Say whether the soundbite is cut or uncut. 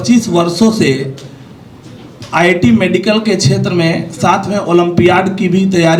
uncut